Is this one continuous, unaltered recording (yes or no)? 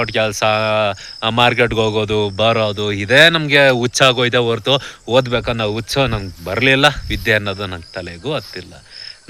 yes